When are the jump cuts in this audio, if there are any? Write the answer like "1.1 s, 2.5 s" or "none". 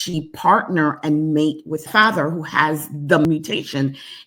3.2 s